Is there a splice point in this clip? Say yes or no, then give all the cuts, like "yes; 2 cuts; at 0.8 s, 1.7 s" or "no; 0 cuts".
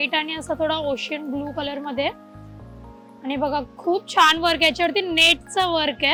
no; 0 cuts